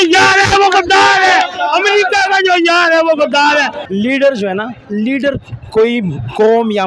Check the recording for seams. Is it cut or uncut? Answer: cut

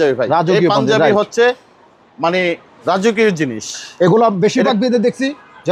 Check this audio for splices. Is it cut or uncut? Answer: uncut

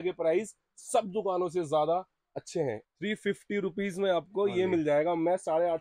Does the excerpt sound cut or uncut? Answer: cut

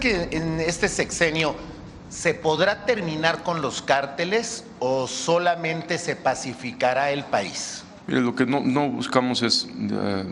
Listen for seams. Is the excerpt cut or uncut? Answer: uncut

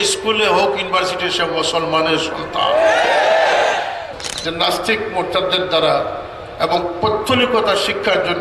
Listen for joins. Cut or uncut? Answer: cut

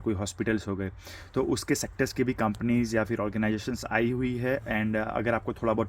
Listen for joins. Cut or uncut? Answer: uncut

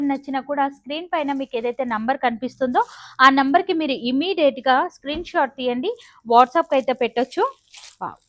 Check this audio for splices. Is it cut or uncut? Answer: uncut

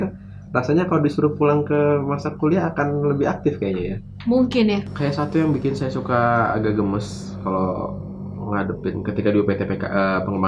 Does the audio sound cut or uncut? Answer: cut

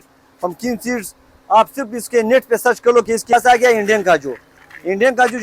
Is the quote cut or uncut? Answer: cut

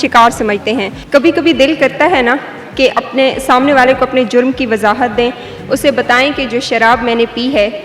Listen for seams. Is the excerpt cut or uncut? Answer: cut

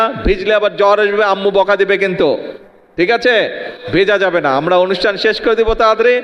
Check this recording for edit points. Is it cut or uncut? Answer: uncut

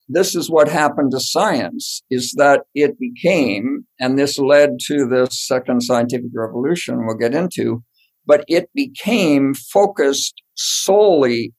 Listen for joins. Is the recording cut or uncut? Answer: uncut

